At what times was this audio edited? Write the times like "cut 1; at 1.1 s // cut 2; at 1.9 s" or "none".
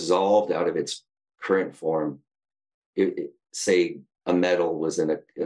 cut 1; at 2.4 s